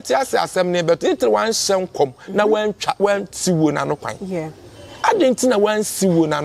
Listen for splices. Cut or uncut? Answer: uncut